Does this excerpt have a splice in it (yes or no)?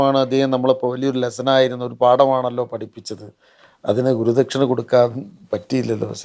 no